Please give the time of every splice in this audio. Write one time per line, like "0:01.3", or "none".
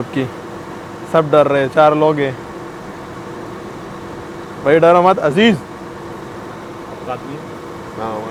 none